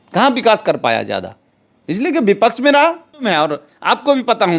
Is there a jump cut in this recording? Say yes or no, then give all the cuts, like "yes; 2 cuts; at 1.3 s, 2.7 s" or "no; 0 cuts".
yes; 1 cut; at 3.2 s